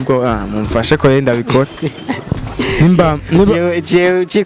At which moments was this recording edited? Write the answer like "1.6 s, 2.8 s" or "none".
none

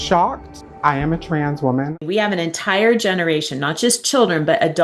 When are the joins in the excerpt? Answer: 2.0 s

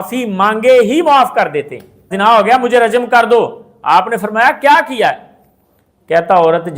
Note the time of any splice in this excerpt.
2.1 s

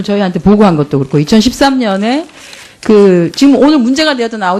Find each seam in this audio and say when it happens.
2.3 s

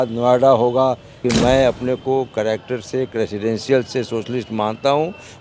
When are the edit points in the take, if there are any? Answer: 1.2 s

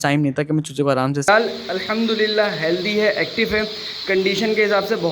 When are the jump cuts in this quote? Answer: 1.3 s

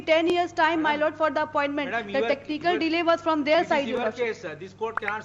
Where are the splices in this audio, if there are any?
none

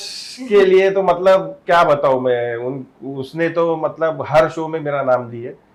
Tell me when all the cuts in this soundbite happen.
none

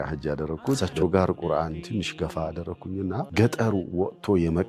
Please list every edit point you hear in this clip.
0.8 s, 3.3 s

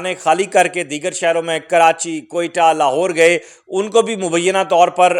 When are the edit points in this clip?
none

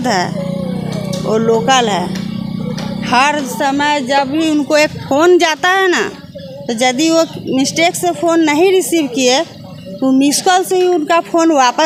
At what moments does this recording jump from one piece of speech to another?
none

